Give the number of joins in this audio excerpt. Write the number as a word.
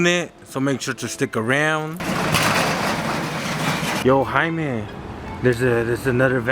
one